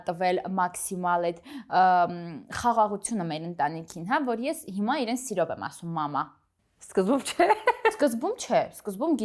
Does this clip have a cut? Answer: no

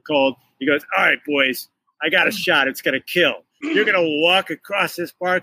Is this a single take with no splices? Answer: no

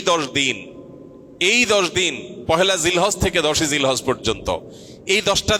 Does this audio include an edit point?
no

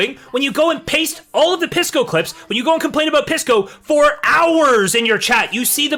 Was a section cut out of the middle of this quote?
no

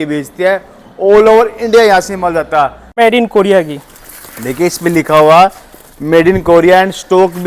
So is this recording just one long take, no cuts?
no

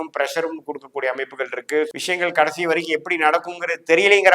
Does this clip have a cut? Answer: yes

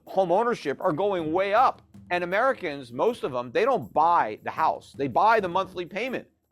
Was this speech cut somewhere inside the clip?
yes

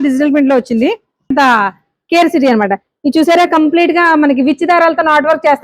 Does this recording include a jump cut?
yes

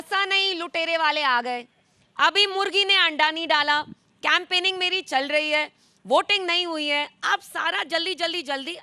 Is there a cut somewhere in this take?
no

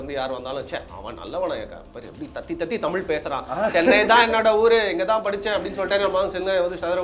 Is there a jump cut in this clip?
no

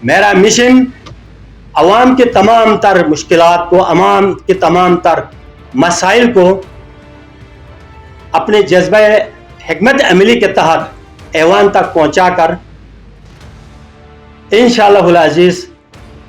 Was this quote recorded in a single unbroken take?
yes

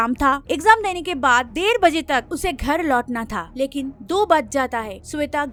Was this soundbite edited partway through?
no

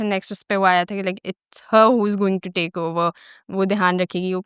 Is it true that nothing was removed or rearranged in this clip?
yes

